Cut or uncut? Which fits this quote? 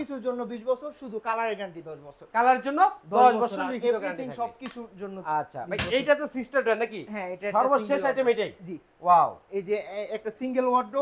uncut